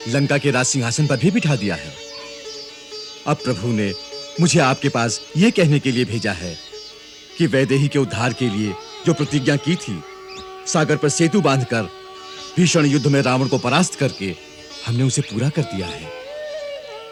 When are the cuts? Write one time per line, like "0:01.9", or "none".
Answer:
none